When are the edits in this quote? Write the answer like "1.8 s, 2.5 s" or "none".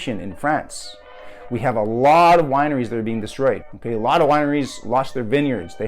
3.7 s